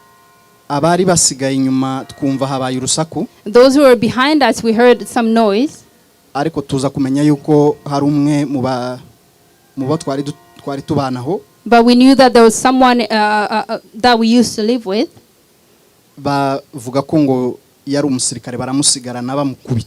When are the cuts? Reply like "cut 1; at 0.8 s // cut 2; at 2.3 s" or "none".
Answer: none